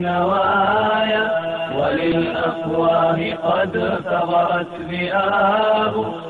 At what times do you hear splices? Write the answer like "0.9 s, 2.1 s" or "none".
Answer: 2.1 s